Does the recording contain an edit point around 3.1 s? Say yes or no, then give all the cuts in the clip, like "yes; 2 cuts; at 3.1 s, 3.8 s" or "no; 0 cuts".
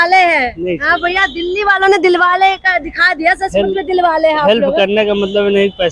no; 0 cuts